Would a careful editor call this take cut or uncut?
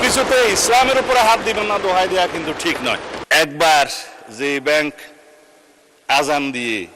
cut